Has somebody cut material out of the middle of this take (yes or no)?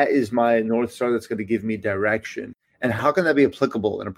no